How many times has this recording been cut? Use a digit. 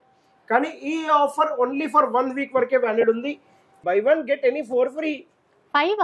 1